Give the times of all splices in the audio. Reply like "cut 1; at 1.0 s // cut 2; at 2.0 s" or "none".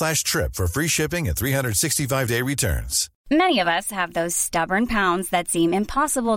cut 1; at 3.1 s